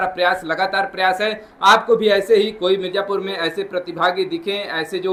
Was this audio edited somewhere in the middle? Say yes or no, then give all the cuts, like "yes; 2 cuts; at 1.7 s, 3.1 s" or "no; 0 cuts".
no; 0 cuts